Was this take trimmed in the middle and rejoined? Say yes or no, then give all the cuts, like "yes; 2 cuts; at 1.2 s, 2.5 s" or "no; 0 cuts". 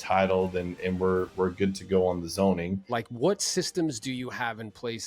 yes; 1 cut; at 3.0 s